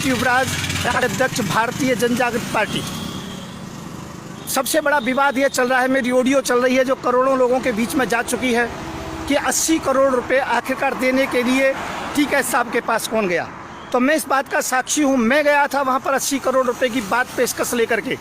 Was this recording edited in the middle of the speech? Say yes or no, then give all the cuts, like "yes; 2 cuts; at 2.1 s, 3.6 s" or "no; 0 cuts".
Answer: yes; 1 cut; at 0.9 s